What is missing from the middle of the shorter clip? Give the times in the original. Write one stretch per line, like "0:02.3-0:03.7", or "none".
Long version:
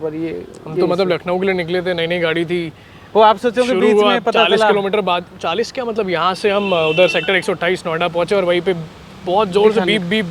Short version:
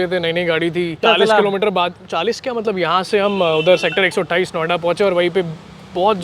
0:02.7-0:04.3